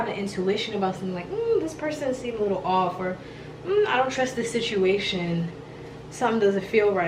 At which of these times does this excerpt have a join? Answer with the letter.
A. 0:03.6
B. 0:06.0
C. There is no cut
C